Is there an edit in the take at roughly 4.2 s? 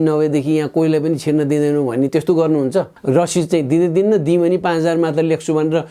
no; 1 cut; at 3.0 s

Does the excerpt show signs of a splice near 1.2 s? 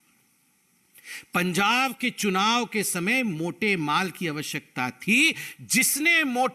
no; 0 cuts

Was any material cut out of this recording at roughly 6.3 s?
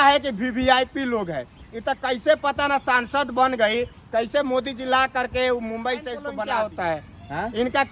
yes; 1 cut; at 6.3 s

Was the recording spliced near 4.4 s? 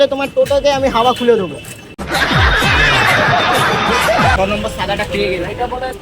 yes; 1 cut; at 4.4 s

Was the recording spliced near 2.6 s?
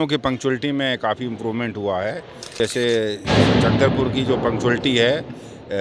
yes; 1 cut; at 2.6 s

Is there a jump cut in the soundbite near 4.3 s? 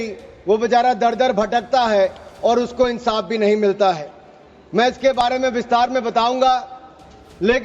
no; 0 cuts

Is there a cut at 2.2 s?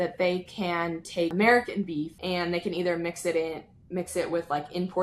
yes; 2 cuts; at 1.3 s, 2.2 s

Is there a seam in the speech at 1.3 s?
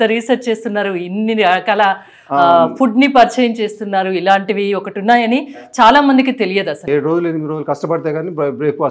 no; 1 cut; at 6.8 s

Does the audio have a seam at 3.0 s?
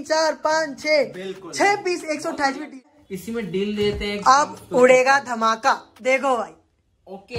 yes; 1 cut; at 3.0 s

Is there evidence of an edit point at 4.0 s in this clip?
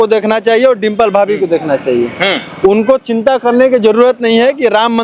no; 0 cuts

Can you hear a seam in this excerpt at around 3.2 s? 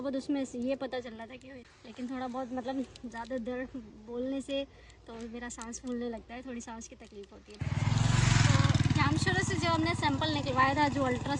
no; 2 cuts; at 1.6 s, 7.8 s

